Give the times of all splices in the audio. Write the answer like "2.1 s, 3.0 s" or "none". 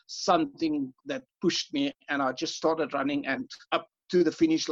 1.0 s, 3.5 s